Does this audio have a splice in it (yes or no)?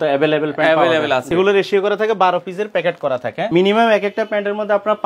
yes